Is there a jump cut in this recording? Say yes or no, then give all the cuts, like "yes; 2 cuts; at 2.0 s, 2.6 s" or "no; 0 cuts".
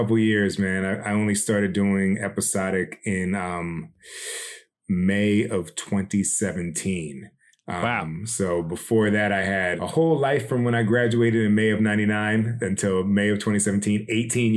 yes; 1 cut; at 4.7 s